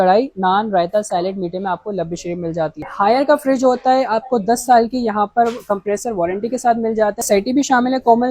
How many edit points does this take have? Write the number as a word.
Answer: two